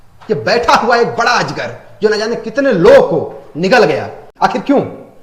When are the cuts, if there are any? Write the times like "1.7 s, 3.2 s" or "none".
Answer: 4.2 s